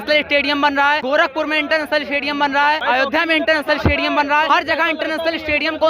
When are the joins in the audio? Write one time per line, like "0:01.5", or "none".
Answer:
0:01.0
0:02.8
0:04.5

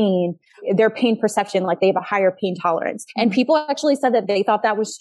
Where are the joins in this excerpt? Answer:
0:03.0

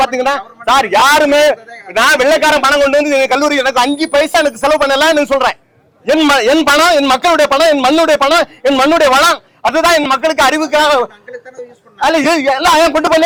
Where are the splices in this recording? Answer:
none

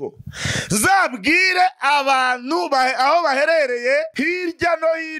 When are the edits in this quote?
none

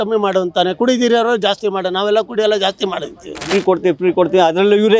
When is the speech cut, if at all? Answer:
0:03.5

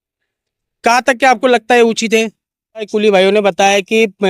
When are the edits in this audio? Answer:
0:02.9

